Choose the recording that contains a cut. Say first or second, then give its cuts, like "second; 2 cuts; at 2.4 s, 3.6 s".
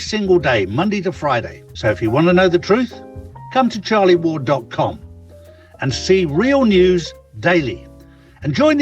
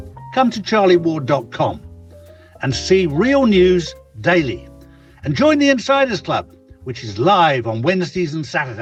first; 1 cut; at 1.6 s